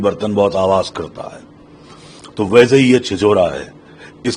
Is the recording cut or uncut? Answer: uncut